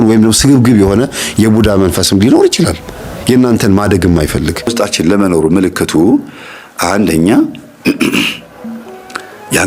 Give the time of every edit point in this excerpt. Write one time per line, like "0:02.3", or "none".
0:04.7